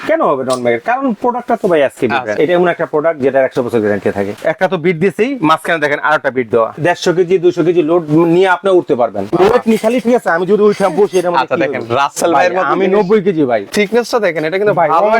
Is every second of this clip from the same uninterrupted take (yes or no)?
no